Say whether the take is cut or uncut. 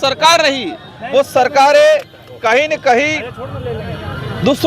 uncut